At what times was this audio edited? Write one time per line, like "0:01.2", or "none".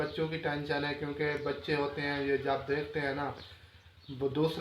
none